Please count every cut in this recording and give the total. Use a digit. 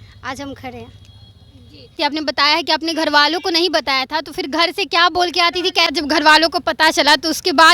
2